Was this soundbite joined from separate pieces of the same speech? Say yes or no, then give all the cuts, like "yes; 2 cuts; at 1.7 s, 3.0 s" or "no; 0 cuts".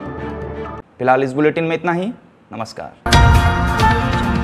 no; 0 cuts